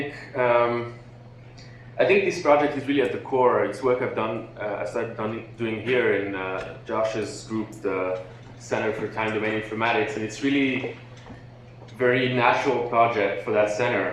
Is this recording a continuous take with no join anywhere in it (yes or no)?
no